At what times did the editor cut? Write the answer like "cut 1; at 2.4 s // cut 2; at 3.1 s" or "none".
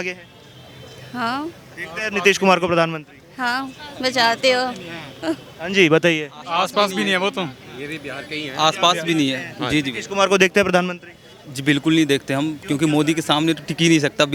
none